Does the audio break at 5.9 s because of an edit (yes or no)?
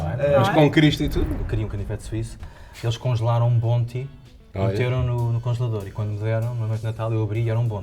no